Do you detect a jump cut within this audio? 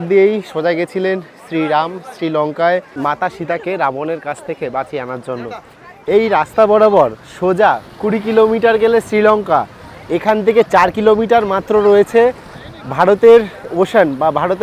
no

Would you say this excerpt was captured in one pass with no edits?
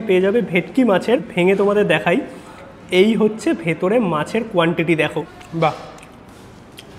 no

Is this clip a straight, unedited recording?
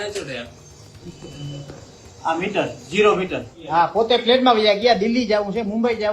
no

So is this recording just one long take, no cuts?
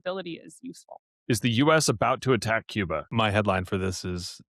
no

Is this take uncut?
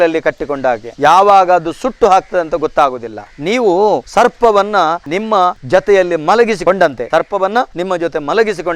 yes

